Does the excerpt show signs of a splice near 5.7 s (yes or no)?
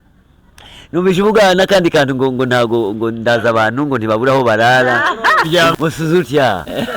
yes